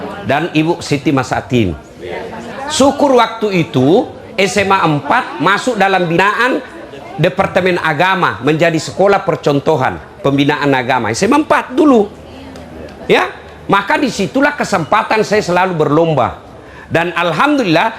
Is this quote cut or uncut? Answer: cut